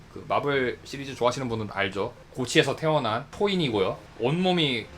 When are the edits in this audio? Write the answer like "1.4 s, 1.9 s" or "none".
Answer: 3.3 s, 4.1 s